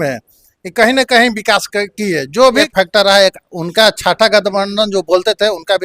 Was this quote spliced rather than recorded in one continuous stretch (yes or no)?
yes